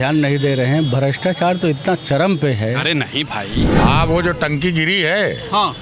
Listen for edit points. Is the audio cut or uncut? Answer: cut